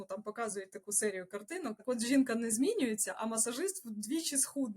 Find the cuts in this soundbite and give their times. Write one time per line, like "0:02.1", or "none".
0:01.8